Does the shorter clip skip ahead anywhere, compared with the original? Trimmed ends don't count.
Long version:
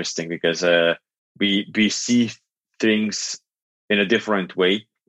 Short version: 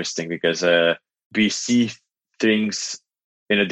yes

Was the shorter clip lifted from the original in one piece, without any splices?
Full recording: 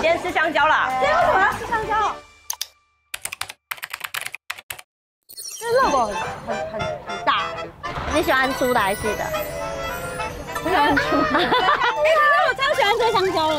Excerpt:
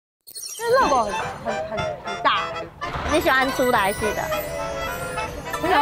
yes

